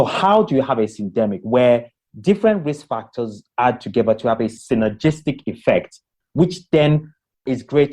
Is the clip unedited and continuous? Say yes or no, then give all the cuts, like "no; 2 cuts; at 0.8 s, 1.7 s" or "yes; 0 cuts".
no; 1 cut; at 4.6 s